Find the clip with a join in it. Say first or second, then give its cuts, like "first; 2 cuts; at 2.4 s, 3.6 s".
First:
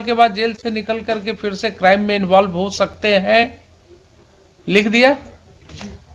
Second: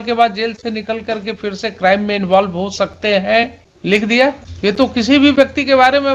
second; 2 cuts; at 3.7 s, 4.5 s